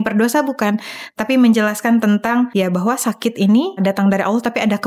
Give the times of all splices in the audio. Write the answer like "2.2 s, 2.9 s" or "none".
2.5 s, 3.8 s